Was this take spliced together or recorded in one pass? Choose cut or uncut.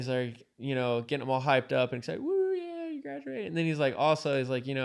uncut